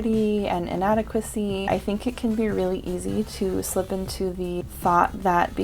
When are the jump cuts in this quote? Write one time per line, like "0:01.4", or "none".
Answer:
0:01.7
0:04.7